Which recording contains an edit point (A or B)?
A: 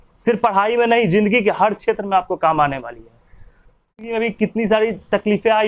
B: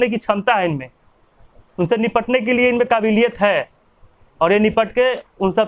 A